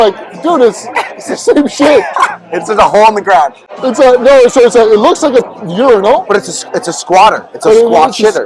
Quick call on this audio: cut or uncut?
uncut